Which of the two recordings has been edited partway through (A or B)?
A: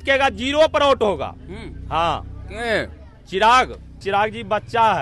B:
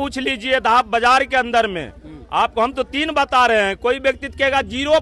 A